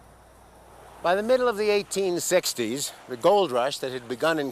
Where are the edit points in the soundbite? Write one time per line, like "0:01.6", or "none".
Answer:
0:02.7